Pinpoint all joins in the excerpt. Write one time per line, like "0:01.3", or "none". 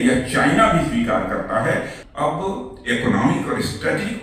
0:02.0